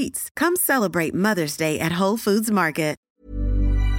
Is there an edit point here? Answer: yes; 1 cut; at 3.1 s

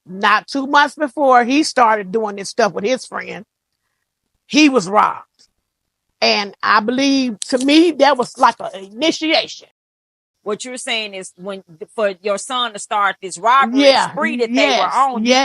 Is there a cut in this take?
yes; 1 cut; at 10.2 s

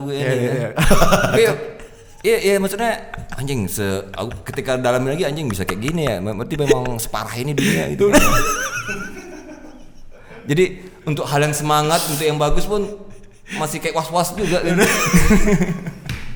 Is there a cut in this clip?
no; 0 cuts

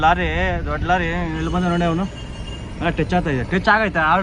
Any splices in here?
no; 0 cuts

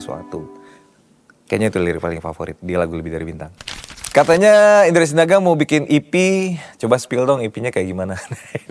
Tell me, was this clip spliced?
no; 0 cuts

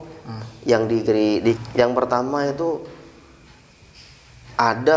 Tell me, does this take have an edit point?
yes; 1 cut; at 1.6 s

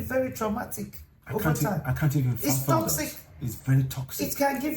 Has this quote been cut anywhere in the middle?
no; 0 cuts

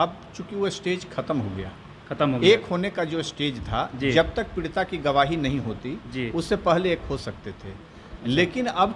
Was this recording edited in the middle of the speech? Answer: no; 0 cuts

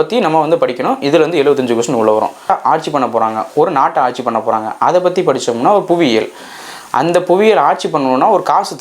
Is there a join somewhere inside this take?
yes; 1 cut; at 2.5 s

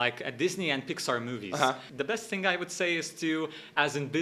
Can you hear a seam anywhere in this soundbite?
yes; 1 cut; at 1.9 s

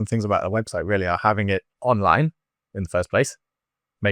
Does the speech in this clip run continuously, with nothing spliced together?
no; 1 cut; at 1.7 s

